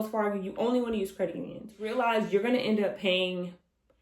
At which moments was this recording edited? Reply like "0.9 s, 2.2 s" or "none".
1.8 s